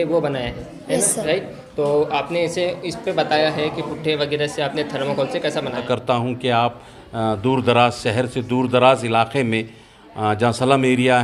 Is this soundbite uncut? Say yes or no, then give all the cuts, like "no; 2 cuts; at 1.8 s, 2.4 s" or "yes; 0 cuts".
no; 1 cut; at 5.8 s